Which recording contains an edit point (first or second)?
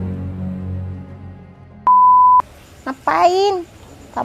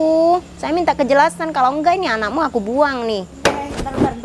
first